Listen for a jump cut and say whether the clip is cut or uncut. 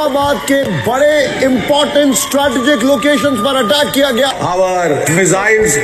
uncut